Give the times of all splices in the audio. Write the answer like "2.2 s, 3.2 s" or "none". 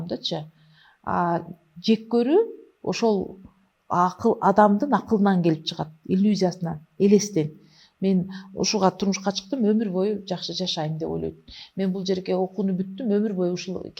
none